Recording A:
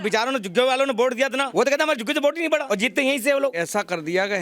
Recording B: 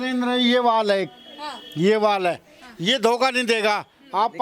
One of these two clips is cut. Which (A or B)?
A